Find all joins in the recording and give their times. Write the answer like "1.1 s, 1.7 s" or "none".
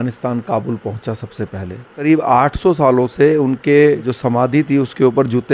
2.0 s, 4.1 s